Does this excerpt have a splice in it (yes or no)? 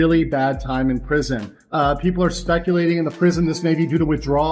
yes